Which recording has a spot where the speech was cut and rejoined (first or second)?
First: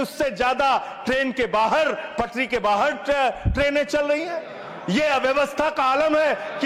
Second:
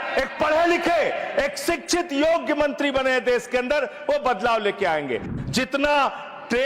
second